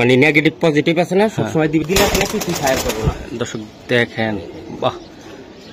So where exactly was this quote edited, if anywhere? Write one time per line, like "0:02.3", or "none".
none